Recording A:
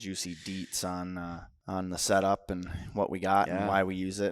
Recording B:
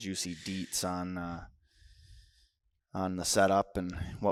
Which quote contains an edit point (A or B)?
A